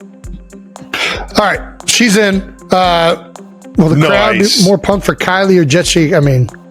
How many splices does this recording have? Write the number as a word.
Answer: one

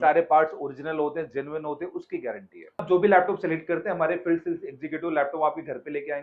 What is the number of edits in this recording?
one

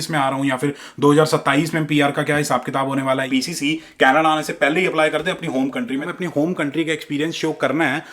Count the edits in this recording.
two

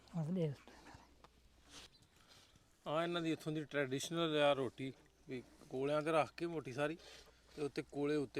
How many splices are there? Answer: one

